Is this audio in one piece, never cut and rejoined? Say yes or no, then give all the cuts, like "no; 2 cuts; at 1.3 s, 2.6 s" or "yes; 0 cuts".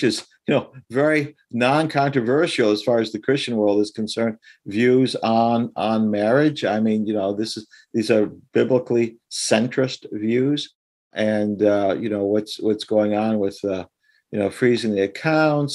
no; 1 cut; at 11.1 s